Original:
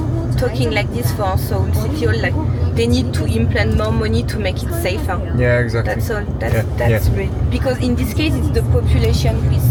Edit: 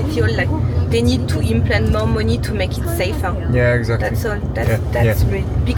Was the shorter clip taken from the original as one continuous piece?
yes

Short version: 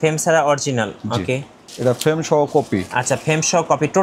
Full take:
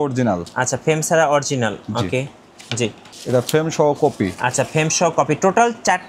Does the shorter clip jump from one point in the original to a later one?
yes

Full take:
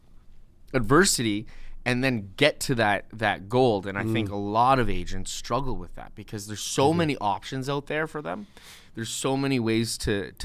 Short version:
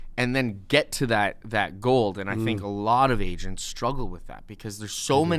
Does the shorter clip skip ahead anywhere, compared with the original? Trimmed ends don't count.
no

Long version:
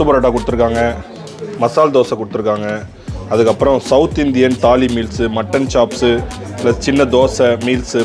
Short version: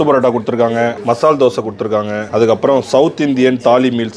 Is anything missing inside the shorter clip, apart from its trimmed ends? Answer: yes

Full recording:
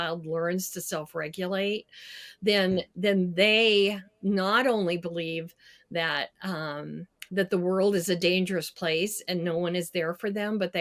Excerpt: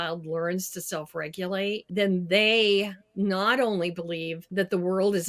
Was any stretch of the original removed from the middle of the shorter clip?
yes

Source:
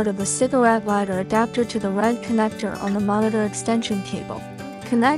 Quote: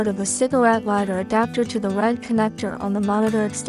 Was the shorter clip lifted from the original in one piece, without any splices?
yes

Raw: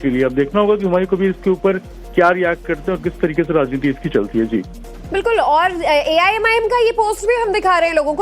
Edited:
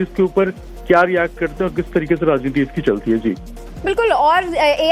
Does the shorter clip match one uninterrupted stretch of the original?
yes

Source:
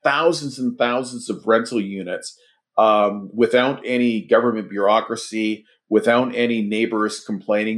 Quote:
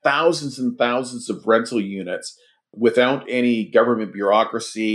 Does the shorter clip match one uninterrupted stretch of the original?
no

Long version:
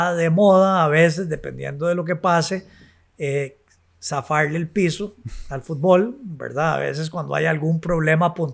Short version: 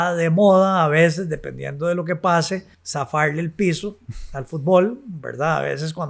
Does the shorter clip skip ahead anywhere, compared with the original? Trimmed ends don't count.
yes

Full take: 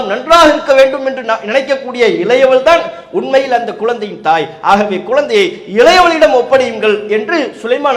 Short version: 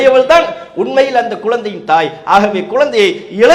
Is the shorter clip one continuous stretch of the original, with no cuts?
yes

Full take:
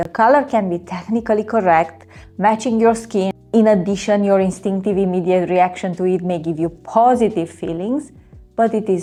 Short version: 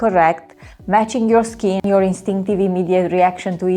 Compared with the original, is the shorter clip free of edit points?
no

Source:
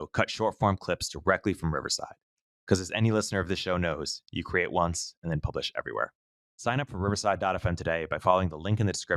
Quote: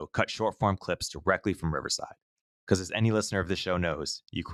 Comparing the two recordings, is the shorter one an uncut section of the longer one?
yes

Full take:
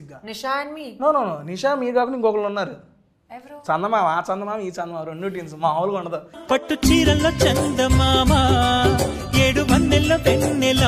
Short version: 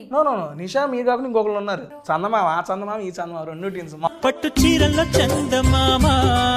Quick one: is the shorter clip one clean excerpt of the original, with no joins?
no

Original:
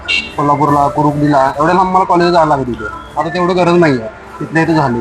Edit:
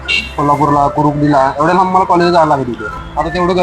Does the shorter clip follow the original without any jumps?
yes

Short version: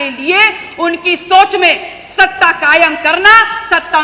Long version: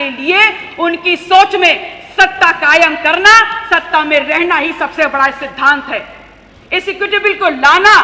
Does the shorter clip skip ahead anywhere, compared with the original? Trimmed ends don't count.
no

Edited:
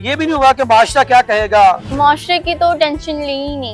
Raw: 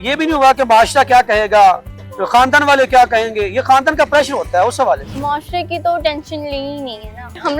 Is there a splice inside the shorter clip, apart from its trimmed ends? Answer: yes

